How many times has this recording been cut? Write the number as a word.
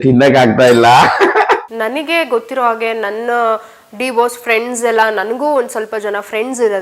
one